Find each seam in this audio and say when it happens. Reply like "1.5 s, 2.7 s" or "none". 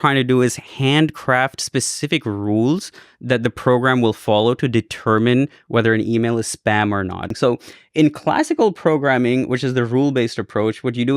7.2 s